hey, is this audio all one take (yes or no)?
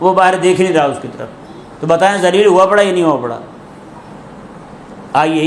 yes